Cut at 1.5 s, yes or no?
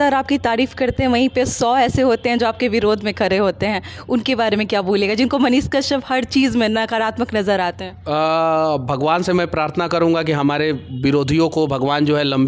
no